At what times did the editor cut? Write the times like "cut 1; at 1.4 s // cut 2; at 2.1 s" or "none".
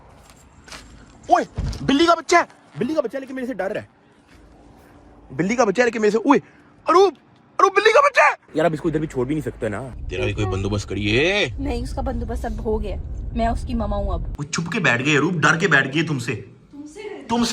cut 1; at 8.4 s // cut 2; at 9.8 s // cut 3; at 14.4 s